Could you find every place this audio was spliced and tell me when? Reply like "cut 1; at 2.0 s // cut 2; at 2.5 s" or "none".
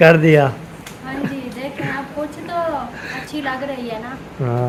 none